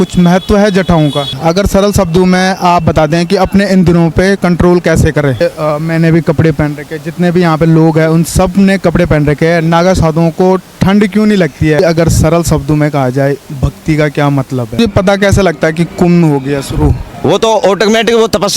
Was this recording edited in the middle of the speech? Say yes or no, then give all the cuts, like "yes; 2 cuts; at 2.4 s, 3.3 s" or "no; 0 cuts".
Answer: yes; 4 cuts; at 1.3 s, 5.3 s, 11.8 s, 14.8 s